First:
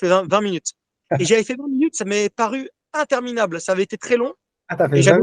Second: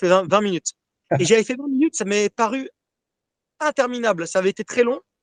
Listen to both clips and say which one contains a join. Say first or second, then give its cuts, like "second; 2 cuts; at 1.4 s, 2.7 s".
first; 1 cut; at 2.8 s